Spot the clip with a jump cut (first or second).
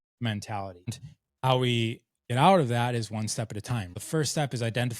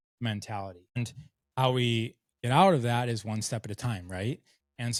first